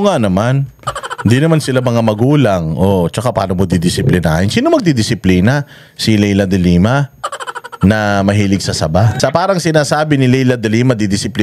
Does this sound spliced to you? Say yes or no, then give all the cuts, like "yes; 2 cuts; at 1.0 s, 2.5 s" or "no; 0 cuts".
yes; 1 cut; at 9.1 s